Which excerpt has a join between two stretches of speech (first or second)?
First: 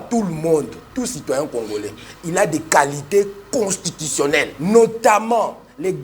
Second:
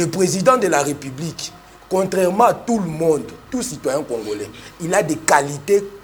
first